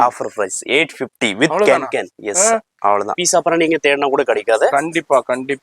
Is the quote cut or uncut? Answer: cut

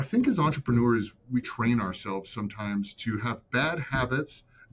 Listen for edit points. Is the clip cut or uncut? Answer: uncut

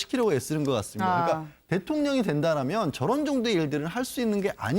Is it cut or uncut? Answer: cut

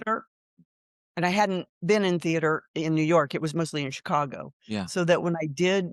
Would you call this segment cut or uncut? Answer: uncut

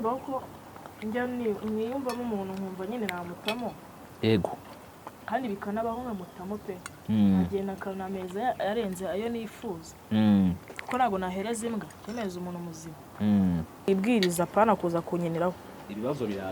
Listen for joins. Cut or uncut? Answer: cut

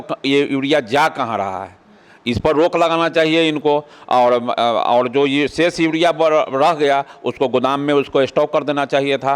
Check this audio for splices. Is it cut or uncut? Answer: uncut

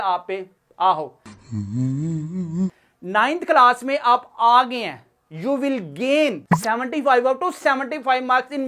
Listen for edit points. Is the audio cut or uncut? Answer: uncut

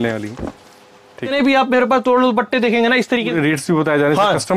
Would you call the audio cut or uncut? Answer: cut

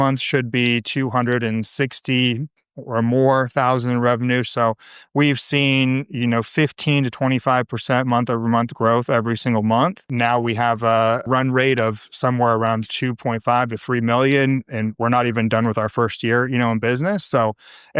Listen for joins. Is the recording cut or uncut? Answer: cut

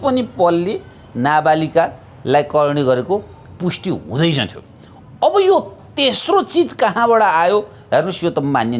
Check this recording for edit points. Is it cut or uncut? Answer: uncut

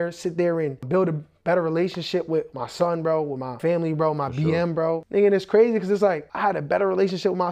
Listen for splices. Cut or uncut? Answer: cut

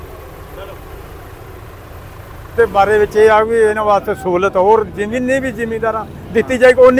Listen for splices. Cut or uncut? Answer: cut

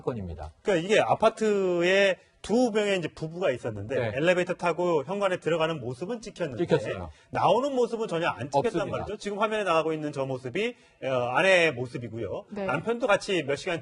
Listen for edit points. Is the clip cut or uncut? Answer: cut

